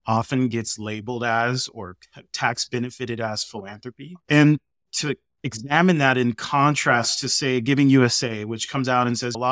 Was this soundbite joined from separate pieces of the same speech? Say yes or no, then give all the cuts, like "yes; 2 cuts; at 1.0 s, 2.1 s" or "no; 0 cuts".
no; 0 cuts